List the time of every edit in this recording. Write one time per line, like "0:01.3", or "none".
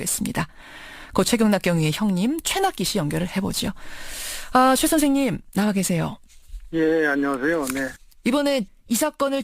0:07.0

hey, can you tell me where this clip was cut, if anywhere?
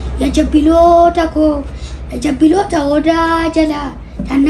none

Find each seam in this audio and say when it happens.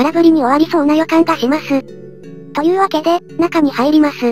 0:03.3

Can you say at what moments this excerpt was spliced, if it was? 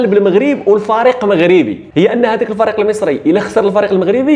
0:01.8

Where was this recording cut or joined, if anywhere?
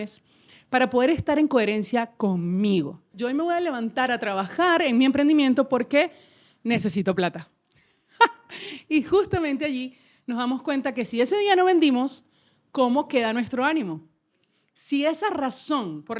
0:03.1

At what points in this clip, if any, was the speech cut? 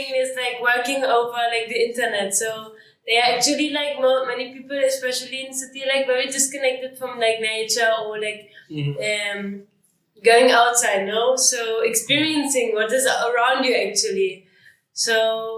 none

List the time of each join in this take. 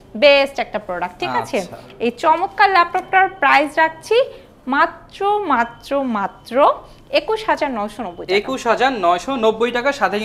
none

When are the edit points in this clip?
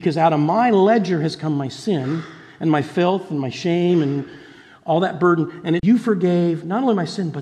0:05.8

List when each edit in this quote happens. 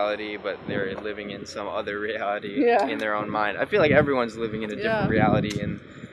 none

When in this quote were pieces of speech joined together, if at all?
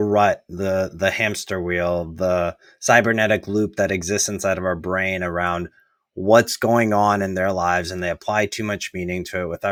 none

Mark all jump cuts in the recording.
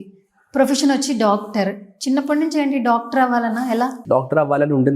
0:04.0

